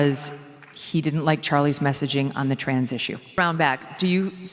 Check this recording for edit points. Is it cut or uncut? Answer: cut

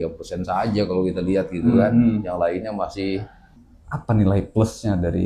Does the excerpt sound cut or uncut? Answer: cut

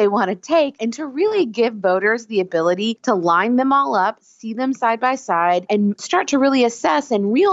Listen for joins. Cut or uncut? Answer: uncut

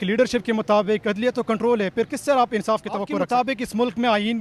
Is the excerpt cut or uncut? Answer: cut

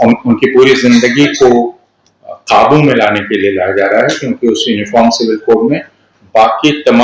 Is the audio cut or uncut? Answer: uncut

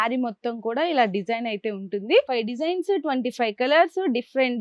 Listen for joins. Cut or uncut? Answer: cut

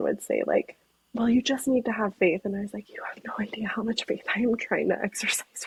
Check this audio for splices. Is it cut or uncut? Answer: uncut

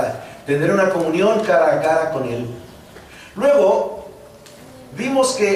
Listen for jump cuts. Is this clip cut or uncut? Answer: uncut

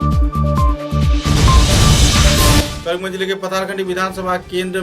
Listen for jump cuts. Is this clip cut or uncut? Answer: cut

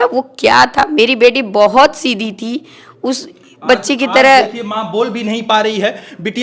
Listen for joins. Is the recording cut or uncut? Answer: uncut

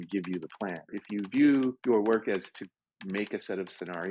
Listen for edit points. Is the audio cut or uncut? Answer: cut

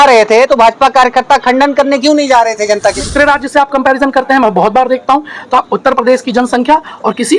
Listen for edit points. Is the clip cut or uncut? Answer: cut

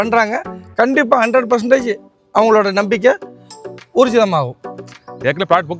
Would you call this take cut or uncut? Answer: cut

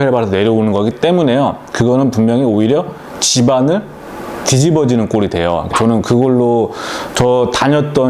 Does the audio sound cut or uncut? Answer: cut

